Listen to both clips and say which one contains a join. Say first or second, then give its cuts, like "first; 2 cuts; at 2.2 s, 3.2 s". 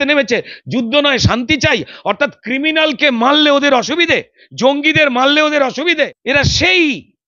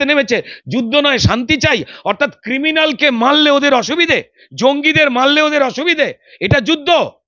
first; 1 cut; at 6.2 s